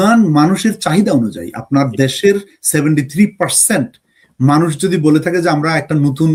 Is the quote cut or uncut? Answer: uncut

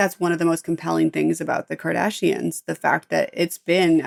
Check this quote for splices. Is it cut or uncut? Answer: uncut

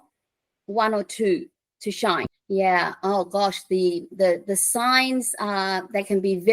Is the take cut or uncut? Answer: cut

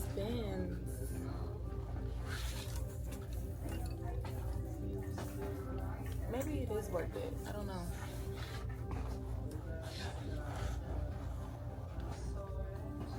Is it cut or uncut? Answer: uncut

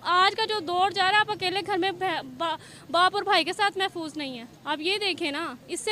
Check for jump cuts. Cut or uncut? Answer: cut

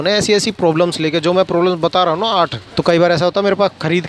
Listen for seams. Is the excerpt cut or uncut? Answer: cut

